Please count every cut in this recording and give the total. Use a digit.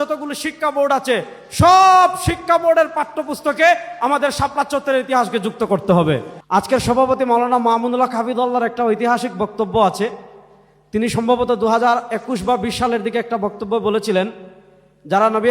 1